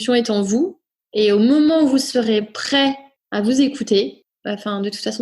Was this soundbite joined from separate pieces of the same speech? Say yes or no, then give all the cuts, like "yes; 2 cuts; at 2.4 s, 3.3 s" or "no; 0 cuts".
yes; 2 cuts; at 3.1 s, 4.3 s